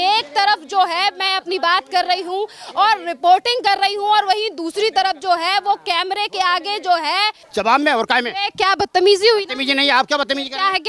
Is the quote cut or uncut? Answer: cut